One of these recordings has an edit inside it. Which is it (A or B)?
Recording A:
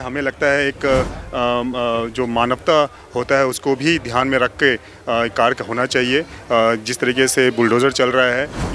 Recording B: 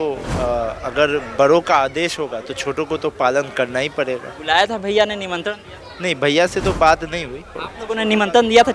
B